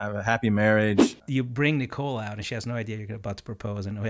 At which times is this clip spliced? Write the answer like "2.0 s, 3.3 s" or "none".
1.1 s